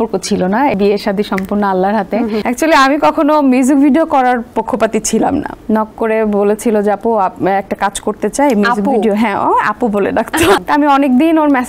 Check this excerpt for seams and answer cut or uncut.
cut